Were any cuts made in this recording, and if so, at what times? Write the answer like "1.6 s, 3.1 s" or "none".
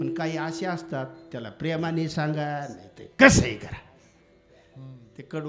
none

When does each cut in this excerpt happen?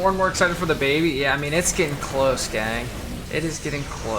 3.2 s

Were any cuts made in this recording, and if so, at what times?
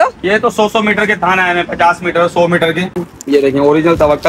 2.9 s

